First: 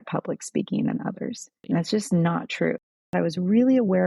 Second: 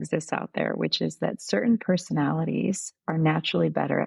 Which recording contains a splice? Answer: first; 2 cuts; at 1.5 s, 3.0 s

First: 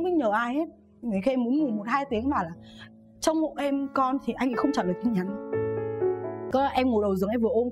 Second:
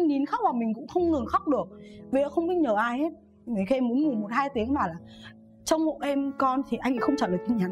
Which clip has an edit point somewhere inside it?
first; 1 cut; at 6.4 s

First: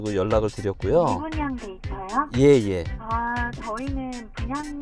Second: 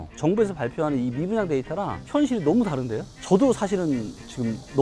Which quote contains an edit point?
second; 1 cut; at 3.1 s

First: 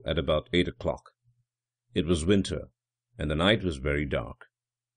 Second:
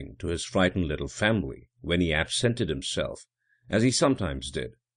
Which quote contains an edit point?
second; 1 cut; at 1.0 s

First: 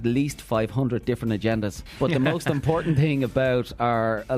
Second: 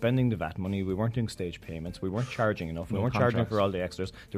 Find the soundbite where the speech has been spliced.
first; 1 cut; at 1.8 s

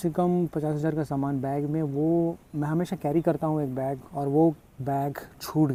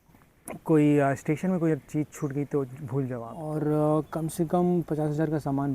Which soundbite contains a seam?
second; 1 cut; at 3.3 s

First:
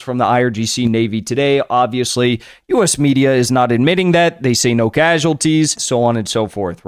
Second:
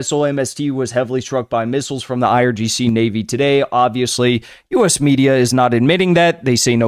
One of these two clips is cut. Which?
first; 1 cut; at 5.8 s

